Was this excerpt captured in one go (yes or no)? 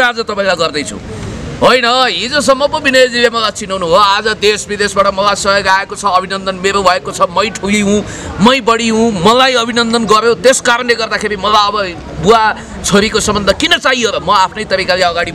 yes